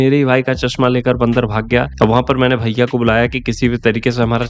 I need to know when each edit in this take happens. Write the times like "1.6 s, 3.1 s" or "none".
none